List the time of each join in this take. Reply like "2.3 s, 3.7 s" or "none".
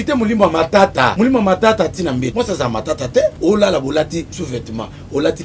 1.1 s, 2.3 s, 3.4 s, 4.4 s

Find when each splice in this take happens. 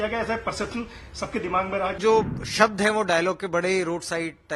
2.0 s

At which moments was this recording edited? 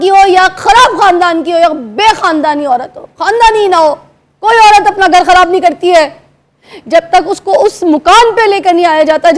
none

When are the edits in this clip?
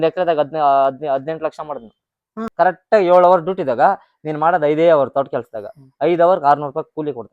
2.4 s

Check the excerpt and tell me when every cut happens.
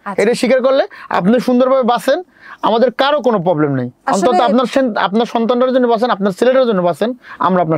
none

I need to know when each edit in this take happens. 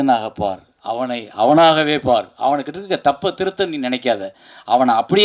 none

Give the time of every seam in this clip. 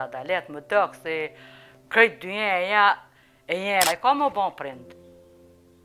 3.9 s

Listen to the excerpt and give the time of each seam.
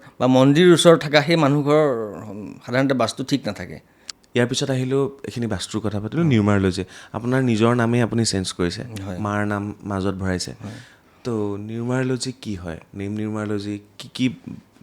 none

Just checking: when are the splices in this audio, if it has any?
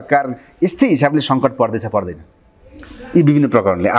none

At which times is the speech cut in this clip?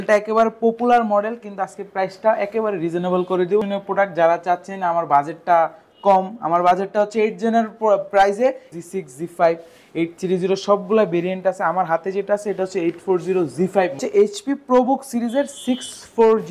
3.6 s, 8.8 s, 14.0 s

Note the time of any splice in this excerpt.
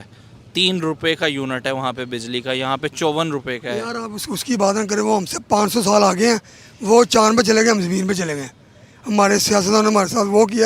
none

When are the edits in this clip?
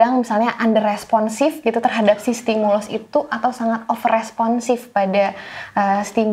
none

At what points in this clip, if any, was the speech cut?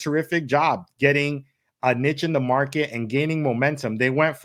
none

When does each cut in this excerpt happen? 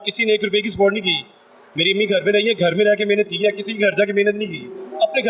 none

